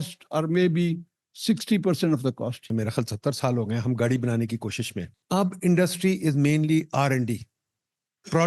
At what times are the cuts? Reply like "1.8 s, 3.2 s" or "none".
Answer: 2.7 s, 5.2 s